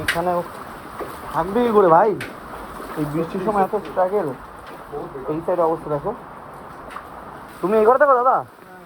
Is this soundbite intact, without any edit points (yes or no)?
no